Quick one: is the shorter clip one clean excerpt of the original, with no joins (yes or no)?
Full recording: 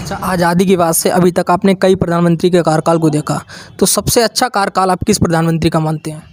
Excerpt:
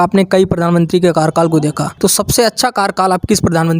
no